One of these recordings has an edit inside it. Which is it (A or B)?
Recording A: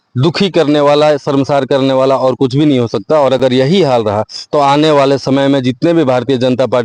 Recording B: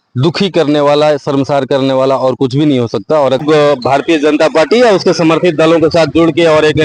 B